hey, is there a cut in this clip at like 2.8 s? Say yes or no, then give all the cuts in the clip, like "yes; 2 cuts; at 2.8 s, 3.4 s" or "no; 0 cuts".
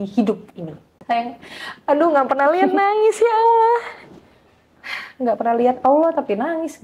no; 1 cut; at 0.9 s